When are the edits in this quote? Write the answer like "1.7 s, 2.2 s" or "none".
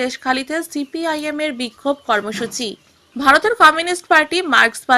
none